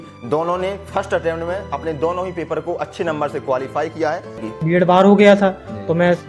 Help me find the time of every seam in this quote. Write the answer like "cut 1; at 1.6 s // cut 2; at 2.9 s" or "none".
cut 1; at 4.5 s